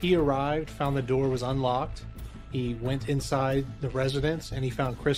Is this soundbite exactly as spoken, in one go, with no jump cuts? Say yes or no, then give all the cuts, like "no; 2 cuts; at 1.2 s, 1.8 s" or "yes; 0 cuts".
yes; 0 cuts